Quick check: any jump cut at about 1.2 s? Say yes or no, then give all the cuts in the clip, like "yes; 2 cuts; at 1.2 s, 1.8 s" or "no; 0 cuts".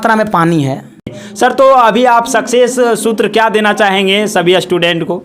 yes; 1 cut; at 1.2 s